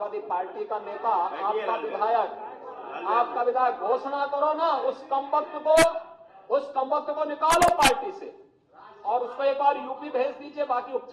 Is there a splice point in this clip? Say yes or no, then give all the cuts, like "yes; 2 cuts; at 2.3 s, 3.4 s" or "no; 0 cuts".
no; 0 cuts